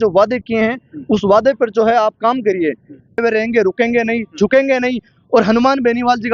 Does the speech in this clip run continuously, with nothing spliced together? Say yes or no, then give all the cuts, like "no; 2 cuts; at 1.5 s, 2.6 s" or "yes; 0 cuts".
no; 1 cut; at 3.2 s